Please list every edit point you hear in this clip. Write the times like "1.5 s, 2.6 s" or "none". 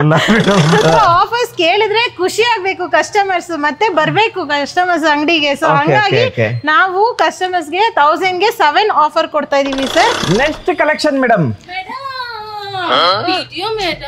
0.8 s, 10.2 s